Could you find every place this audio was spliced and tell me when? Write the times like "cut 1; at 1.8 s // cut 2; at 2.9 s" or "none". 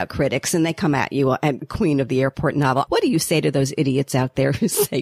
cut 1; at 1.6 s // cut 2; at 2.9 s